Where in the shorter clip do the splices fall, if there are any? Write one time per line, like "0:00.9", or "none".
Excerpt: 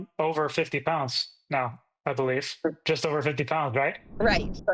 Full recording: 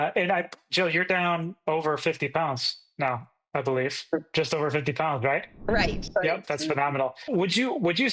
none